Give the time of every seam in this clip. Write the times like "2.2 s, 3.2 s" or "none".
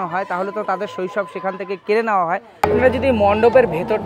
2.7 s